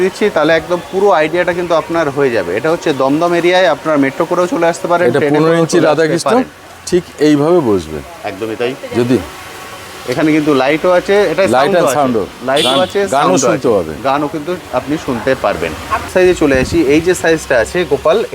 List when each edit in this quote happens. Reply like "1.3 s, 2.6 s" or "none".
16.1 s